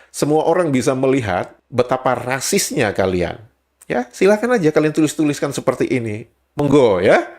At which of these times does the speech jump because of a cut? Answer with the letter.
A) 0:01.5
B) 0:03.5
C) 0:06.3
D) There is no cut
A